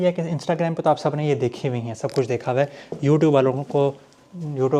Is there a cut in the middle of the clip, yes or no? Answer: no